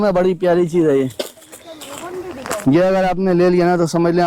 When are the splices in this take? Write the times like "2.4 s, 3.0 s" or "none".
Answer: none